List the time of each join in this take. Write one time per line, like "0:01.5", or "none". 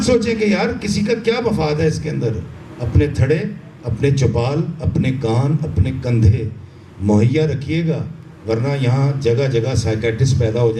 none